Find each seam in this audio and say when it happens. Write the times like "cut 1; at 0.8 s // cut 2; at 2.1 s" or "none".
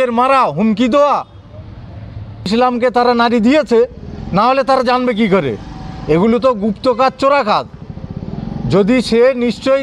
cut 1; at 2.5 s

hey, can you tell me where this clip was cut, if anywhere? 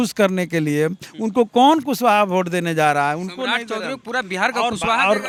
none

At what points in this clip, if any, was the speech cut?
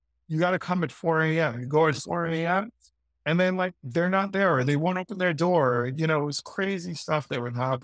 none

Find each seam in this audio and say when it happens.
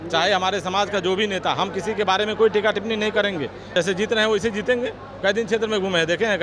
cut 1; at 3.7 s

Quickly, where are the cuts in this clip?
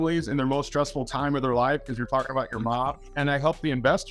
cut 1; at 3.1 s

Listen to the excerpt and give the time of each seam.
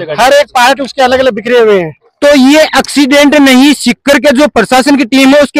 cut 1; at 2.0 s

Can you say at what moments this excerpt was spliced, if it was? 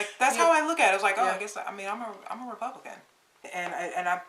cut 1; at 3.1 s

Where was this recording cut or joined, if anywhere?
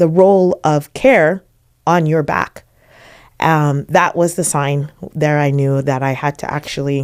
none

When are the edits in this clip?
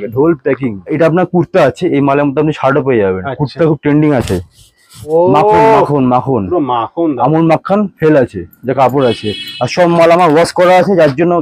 cut 1; at 0.9 s // cut 2; at 5.1 s

